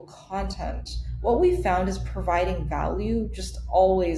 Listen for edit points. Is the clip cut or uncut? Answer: uncut